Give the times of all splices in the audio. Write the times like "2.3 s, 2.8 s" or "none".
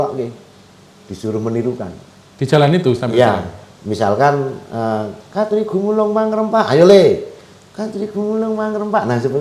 none